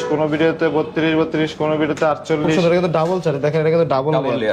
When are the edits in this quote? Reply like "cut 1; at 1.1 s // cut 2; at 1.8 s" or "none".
cut 1; at 2.6 s